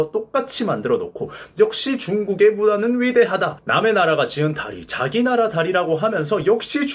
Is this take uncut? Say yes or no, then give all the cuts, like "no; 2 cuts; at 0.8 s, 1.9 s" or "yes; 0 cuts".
no; 1 cut; at 3.5 s